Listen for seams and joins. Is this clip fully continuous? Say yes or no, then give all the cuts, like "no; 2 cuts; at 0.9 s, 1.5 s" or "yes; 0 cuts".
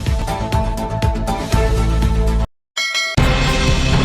no; 1 cut; at 3.1 s